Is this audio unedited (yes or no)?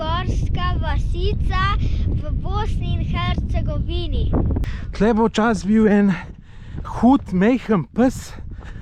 no